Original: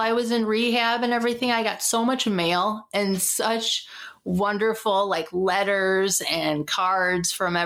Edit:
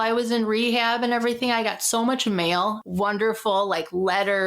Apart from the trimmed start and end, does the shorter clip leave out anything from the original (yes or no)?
yes